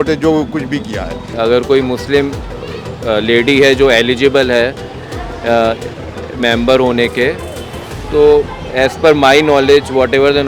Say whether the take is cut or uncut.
cut